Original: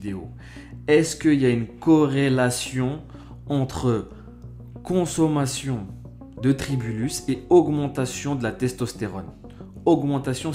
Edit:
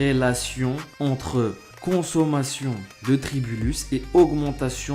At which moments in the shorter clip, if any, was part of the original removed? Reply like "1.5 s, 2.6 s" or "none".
0.9 s, 1.7 s, 2.9 s